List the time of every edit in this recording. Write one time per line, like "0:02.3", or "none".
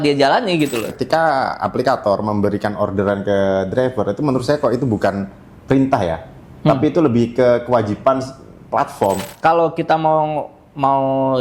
0:01.0
0:09.3